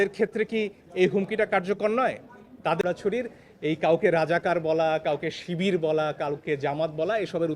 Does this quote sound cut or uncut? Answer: cut